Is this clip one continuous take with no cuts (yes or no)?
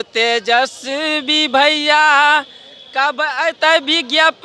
yes